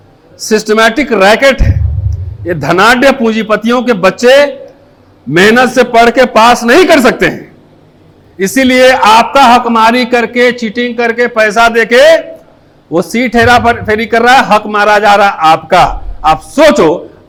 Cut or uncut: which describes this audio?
uncut